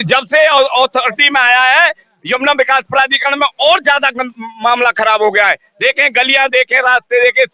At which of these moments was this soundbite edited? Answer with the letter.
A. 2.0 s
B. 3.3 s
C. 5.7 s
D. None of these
D